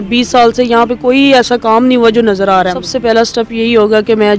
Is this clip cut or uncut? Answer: cut